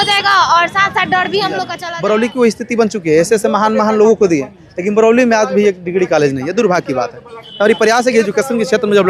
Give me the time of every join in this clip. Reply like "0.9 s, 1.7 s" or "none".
1.8 s

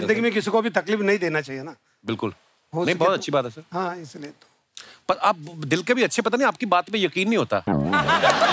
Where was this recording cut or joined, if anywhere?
none

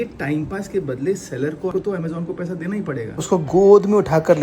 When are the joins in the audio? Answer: 3.2 s

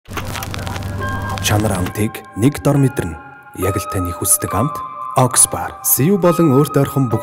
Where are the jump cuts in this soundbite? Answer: 0.9 s

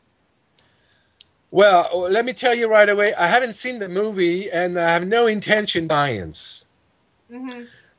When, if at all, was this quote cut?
none

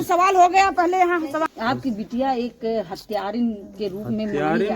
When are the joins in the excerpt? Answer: 1.5 s

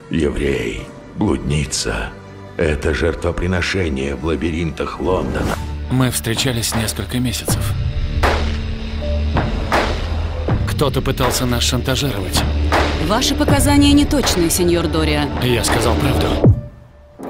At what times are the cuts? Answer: 5.5 s

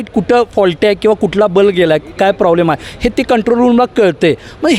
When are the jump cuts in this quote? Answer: none

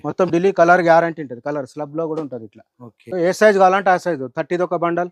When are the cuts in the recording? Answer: 3.1 s

